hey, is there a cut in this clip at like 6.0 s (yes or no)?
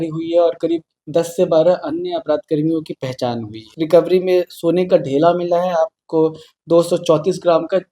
no